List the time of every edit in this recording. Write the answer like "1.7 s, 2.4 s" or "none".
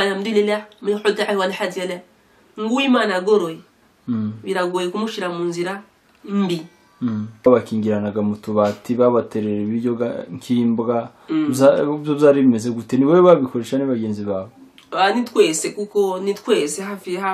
7.5 s